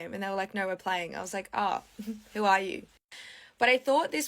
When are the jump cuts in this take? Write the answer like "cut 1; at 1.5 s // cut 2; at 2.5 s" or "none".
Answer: cut 1; at 3.0 s